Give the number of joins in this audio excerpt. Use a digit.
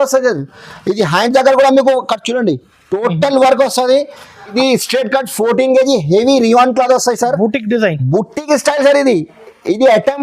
1